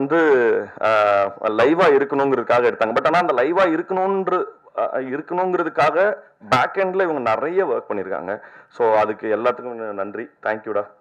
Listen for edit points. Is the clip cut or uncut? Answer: uncut